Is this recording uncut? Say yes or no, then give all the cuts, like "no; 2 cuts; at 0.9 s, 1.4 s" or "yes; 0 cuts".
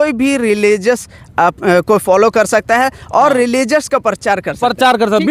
yes; 0 cuts